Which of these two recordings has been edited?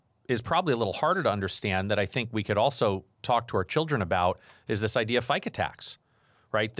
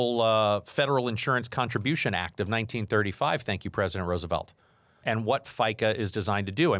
second; 1 cut; at 5.0 s

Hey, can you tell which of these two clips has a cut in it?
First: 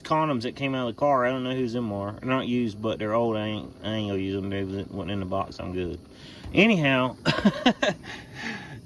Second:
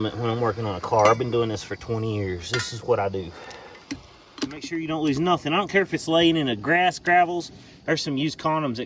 second; 1 cut; at 4.7 s

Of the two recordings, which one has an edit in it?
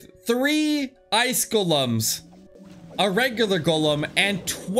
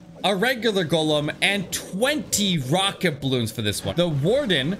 second; 1 cut; at 3.8 s

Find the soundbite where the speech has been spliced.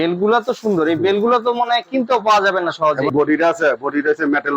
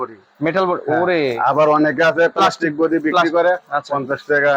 first; 1 cut; at 3.1 s

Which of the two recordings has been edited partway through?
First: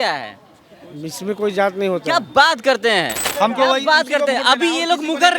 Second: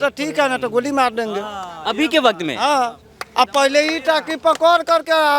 first; 1 cut; at 3.2 s

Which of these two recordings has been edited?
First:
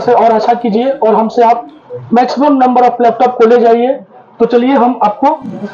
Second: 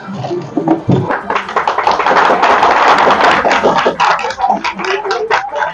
second; 1 cut; at 1.0 s

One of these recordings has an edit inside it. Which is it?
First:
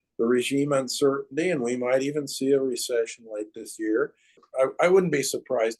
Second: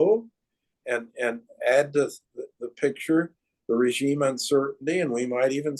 first; 1 cut; at 4.4 s

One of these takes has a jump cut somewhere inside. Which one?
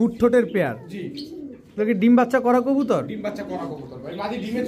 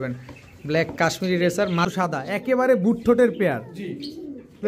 second; 1 cut; at 1.9 s

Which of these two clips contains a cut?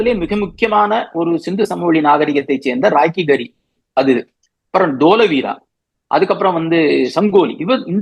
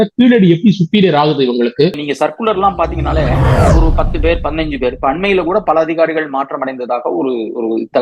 second; 1 cut; at 2.0 s

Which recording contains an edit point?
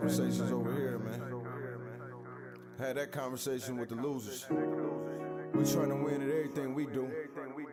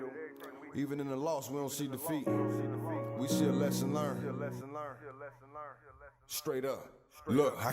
second; 1 cut; at 5.6 s

